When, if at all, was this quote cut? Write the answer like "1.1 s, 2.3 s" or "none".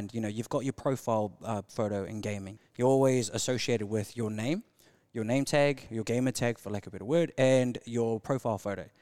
2.5 s